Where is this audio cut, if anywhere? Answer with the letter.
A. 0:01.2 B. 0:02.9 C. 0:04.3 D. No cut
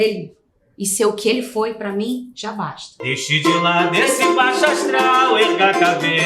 B